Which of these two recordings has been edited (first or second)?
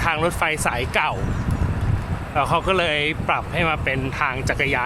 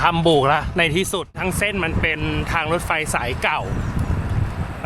second